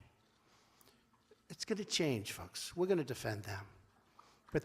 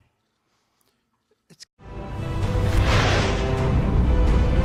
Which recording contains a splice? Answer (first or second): first